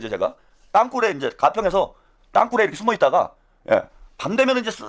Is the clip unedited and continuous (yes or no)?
yes